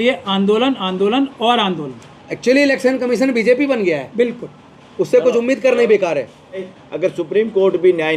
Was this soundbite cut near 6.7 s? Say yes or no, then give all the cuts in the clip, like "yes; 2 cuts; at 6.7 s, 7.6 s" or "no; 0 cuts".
yes; 1 cut; at 6.7 s